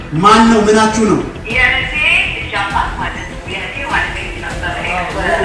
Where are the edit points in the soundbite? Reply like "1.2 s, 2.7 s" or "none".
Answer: 1.4 s